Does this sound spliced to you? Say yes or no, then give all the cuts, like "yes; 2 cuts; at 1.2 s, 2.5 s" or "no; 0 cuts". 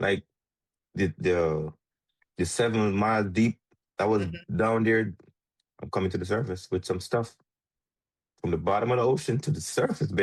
no; 0 cuts